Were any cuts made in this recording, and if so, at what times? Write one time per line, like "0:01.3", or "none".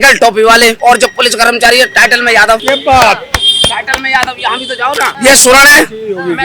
0:00.8
0:02.6
0:05.1